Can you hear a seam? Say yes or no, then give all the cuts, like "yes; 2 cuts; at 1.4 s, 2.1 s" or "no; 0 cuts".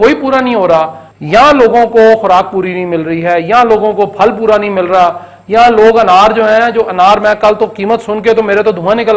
yes; 1 cut; at 1.0 s